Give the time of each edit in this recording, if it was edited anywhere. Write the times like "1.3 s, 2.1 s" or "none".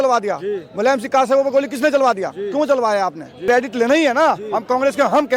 3.4 s